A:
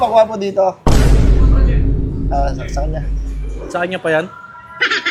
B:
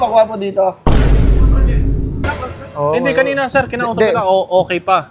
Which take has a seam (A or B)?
B